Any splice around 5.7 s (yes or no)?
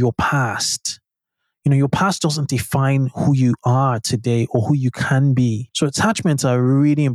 yes